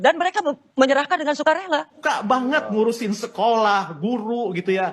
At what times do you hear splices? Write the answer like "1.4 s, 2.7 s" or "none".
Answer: 2.0 s